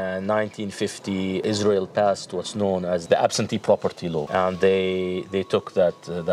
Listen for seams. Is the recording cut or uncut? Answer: cut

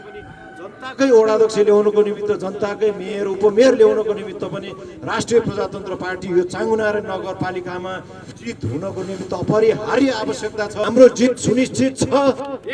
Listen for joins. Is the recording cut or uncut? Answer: cut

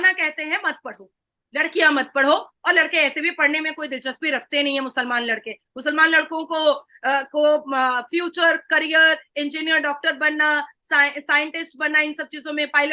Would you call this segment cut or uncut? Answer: uncut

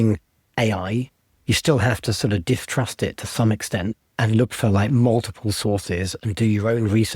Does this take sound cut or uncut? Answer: cut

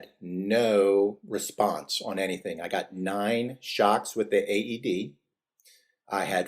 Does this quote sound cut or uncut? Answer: cut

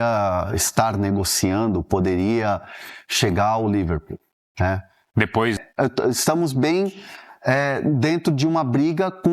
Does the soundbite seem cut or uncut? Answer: cut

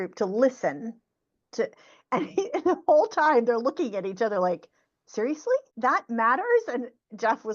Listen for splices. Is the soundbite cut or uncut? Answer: cut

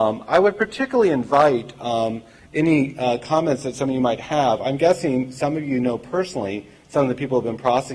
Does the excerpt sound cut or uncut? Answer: uncut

